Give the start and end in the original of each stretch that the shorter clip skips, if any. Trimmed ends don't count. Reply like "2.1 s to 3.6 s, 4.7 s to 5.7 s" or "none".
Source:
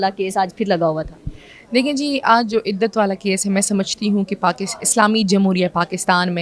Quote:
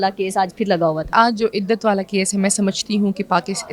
1.1 s to 2.2 s